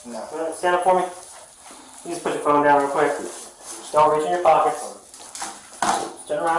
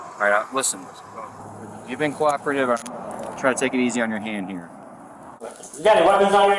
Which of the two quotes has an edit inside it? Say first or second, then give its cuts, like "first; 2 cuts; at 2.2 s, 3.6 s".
second; 1 cut; at 5.4 s